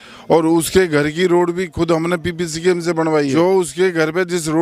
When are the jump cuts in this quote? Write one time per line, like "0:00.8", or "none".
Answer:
0:03.3